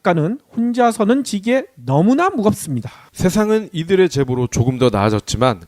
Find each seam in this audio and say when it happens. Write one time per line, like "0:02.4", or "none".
none